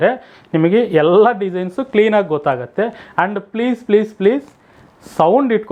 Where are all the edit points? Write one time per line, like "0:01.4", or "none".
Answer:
none

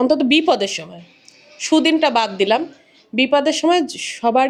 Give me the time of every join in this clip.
none

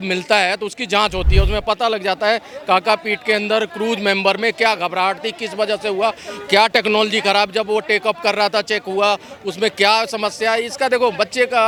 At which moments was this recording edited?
none

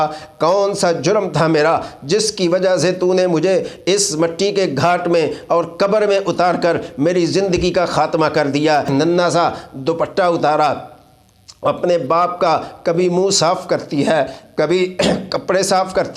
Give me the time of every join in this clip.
0:08.9

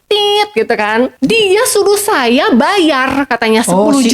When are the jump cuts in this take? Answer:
0:01.1

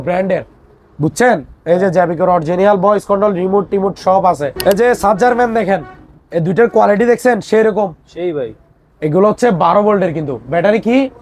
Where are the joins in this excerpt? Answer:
0:04.6

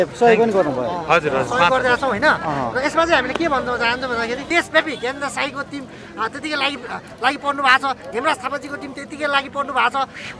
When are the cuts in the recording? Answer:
0:04.5

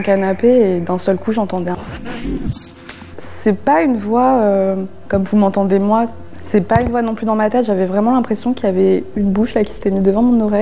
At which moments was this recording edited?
none

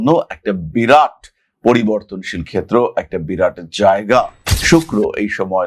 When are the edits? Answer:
0:04.4

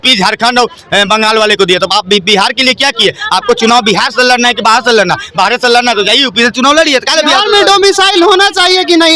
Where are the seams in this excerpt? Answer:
none

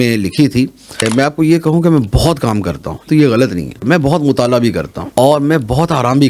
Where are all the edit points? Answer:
0:01.0
0:03.0
0:03.8
0:04.9

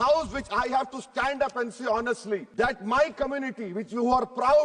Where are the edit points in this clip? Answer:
0:02.5

